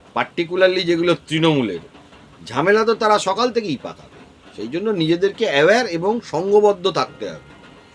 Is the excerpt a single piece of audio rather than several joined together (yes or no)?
yes